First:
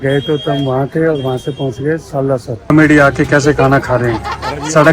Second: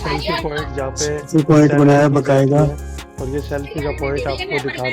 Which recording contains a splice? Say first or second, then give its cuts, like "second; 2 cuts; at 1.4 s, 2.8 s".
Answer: first; 1 cut; at 2.7 s